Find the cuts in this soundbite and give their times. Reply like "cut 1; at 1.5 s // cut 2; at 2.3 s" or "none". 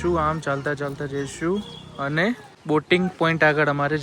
cut 1; at 2.5 s